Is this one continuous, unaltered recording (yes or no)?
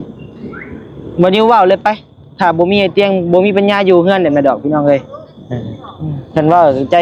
yes